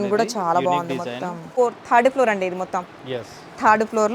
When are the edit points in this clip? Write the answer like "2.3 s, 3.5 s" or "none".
1.6 s